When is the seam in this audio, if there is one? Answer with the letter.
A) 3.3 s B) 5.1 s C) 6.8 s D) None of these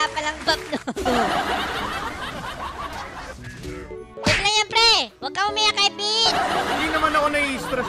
A